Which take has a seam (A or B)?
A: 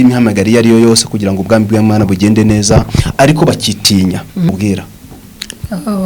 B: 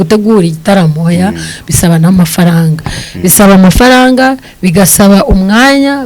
A